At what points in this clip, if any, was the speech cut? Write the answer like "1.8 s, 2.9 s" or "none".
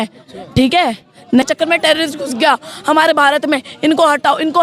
1.4 s